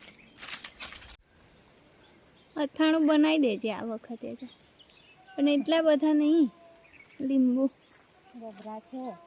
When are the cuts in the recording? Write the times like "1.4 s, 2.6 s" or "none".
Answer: 1.2 s